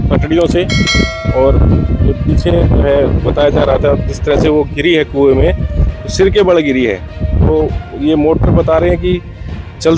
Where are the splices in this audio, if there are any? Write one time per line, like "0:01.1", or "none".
none

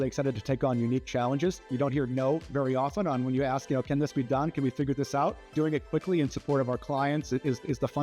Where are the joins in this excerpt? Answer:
0:01.7
0:05.5

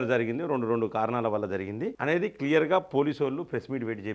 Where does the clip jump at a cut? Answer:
0:01.9

